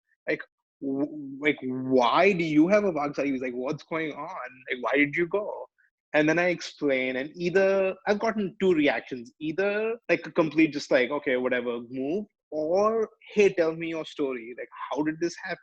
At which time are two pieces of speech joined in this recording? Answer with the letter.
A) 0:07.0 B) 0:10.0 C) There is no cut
B